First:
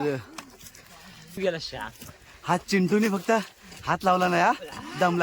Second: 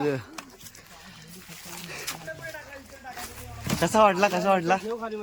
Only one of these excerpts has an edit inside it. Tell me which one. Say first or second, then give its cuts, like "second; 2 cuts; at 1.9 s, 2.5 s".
first; 1 cut; at 1.4 s